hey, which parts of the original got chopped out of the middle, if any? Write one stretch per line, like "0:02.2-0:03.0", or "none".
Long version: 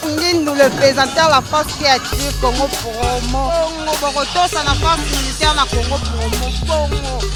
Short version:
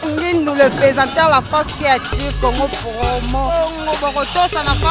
none